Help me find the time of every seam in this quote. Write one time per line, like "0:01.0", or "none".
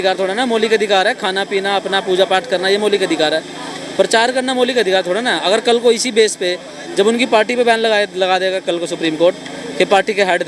none